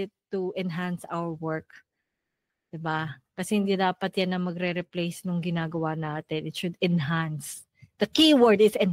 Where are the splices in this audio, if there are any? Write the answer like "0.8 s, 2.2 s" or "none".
none